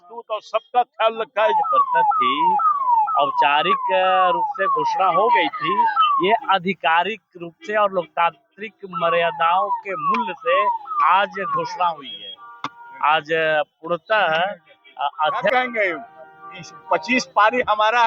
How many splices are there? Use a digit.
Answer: 2